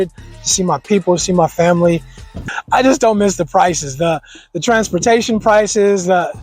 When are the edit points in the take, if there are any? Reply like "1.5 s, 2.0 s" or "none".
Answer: 2.4 s